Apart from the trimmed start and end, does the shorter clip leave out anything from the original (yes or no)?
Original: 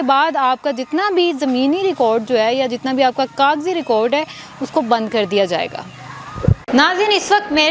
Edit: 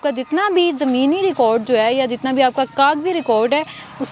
no